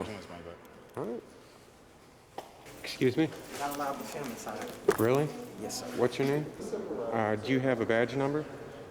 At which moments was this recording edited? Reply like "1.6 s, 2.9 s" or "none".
2.7 s, 6.6 s